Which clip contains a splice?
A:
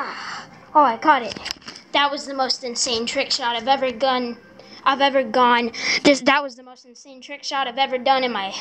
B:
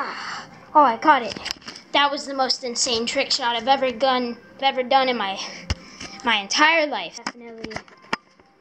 B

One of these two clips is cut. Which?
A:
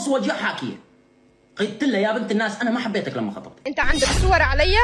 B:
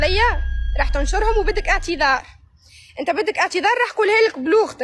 A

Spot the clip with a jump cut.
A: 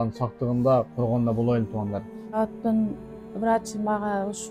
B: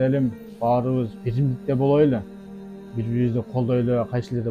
A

